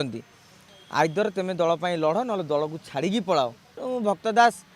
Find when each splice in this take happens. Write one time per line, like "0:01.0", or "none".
0:03.7